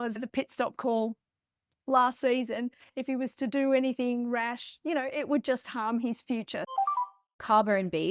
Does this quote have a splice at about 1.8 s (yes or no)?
no